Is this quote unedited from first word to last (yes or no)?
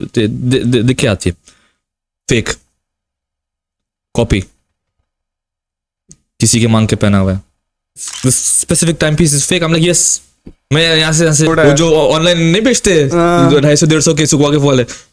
no